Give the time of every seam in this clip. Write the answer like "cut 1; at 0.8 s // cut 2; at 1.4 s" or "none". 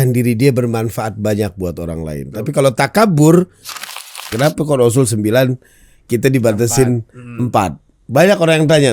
cut 1; at 4.0 s